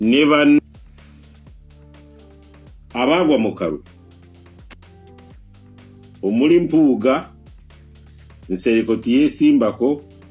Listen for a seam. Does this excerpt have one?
no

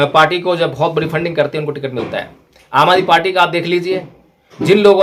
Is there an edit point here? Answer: no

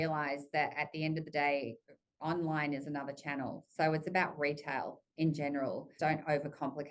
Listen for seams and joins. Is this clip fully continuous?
no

